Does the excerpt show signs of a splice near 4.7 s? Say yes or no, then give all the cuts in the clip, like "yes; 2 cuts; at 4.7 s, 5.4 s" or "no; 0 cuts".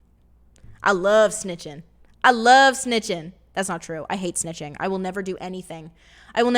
no; 0 cuts